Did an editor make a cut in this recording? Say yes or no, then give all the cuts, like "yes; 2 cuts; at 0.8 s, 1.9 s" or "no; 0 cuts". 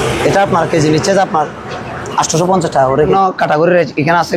yes; 1 cut; at 3.1 s